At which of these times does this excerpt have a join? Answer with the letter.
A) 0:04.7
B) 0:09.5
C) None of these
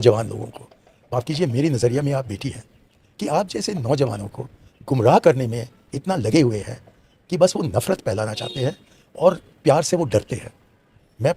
C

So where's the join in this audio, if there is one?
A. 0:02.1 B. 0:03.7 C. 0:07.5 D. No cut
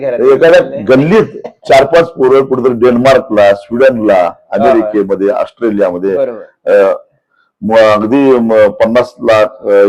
D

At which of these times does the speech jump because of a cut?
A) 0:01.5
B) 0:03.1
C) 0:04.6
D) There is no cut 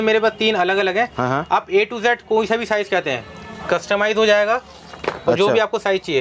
D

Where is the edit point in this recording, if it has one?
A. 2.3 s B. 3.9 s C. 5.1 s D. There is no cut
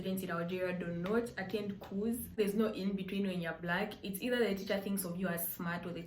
A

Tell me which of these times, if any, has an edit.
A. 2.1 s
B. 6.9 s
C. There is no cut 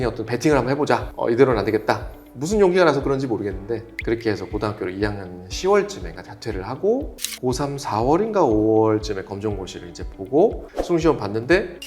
C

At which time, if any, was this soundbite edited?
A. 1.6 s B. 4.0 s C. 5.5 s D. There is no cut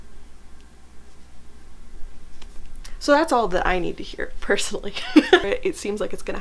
C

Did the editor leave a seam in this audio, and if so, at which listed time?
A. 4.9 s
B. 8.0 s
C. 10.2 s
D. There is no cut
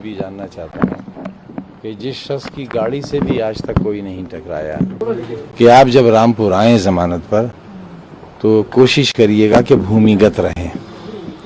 A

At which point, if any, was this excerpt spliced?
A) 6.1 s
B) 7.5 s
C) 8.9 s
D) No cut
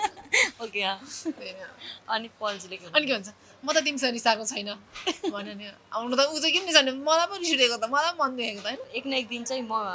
C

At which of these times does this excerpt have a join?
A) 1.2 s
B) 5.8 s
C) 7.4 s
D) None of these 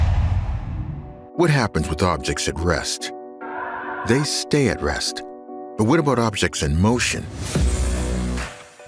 A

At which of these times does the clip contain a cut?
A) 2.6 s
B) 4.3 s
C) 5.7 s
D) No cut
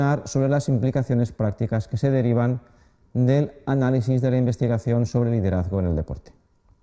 D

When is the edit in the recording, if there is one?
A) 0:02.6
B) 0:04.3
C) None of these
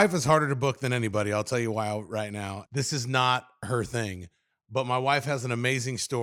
A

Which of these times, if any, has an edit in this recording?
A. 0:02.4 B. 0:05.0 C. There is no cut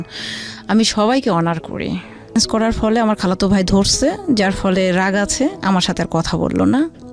A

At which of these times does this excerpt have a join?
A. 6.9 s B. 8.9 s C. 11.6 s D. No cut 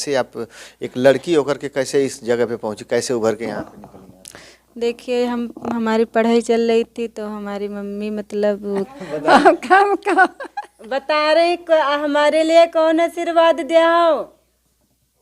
B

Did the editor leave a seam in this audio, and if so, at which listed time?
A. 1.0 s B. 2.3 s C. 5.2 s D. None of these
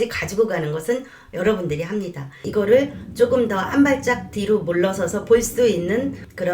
B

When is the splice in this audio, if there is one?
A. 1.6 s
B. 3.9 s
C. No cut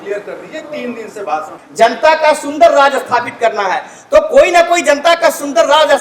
A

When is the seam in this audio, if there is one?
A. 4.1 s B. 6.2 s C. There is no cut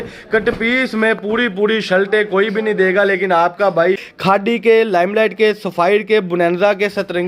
A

